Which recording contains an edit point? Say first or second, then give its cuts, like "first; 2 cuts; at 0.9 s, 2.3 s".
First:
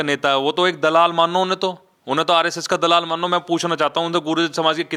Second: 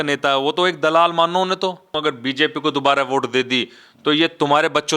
second; 1 cut; at 2.0 s